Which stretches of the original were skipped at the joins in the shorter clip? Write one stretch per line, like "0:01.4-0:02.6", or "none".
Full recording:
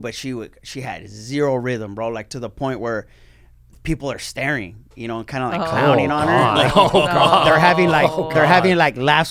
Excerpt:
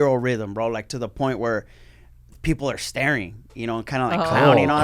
none